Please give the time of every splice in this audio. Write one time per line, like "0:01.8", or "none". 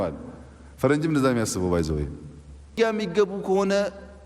0:02.7